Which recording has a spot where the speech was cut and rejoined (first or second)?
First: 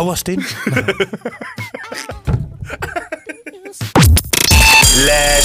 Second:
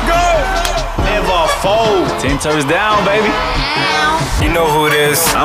first